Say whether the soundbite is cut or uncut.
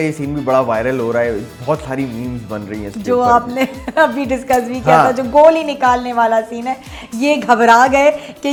uncut